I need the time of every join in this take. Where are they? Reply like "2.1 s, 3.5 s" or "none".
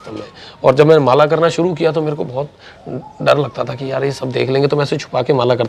none